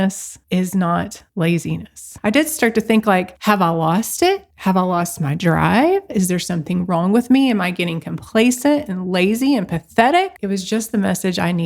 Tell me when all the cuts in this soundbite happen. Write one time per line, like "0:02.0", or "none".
0:02.2
0:04.5
0:10.4